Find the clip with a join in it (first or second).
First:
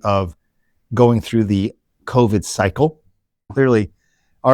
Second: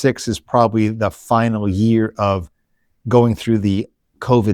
first